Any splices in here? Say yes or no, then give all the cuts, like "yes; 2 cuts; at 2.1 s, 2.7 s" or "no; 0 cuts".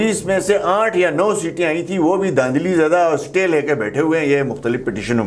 no; 0 cuts